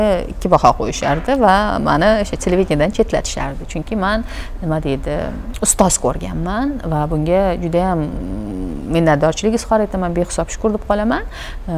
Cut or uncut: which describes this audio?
uncut